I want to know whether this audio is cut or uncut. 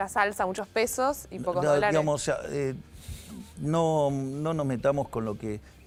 uncut